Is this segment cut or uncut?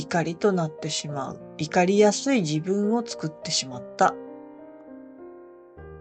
uncut